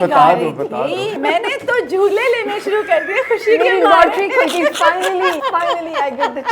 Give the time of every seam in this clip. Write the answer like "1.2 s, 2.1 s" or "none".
1.2 s, 5.4 s